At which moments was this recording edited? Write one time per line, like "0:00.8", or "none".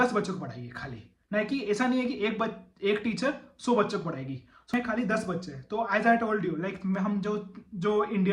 0:04.7